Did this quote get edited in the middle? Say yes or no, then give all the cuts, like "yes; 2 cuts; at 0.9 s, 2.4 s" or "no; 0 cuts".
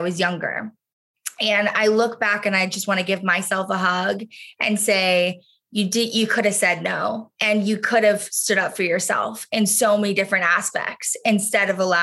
no; 0 cuts